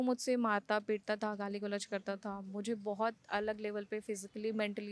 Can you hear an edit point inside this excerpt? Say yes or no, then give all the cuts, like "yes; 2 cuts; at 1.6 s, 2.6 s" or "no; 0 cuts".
no; 0 cuts